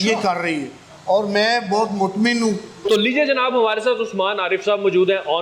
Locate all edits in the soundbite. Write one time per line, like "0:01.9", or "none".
none